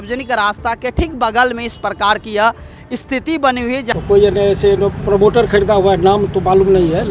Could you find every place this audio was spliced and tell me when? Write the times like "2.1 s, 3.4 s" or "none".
3.9 s

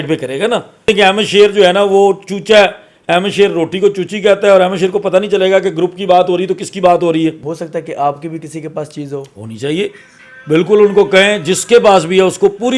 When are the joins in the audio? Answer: 0.9 s, 7.4 s

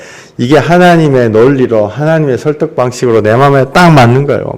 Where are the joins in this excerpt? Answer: none

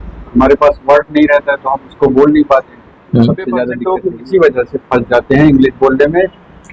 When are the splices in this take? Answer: 3.8 s

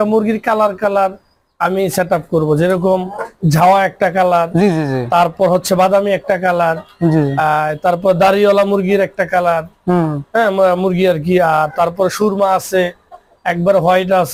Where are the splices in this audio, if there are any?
none

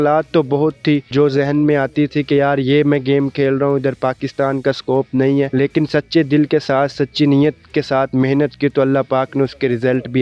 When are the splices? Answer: 1.1 s, 5.5 s

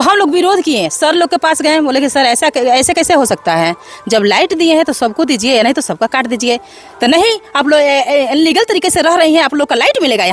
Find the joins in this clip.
none

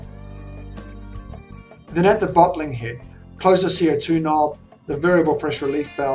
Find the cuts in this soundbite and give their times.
1.9 s

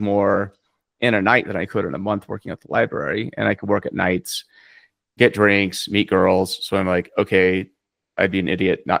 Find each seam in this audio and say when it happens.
none

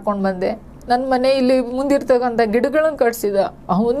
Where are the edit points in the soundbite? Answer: none

